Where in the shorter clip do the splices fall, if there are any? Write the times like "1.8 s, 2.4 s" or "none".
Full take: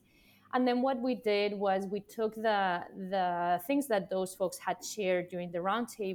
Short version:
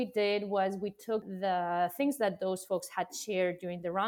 1.3 s